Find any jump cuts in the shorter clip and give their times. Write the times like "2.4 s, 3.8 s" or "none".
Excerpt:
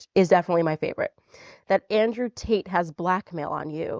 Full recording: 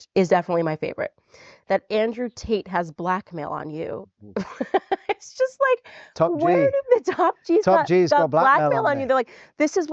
none